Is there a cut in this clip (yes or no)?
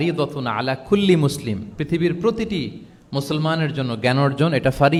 no